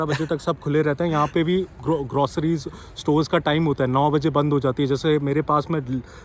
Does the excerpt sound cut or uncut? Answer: uncut